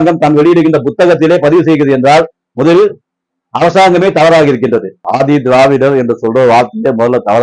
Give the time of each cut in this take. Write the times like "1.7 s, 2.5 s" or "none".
5.0 s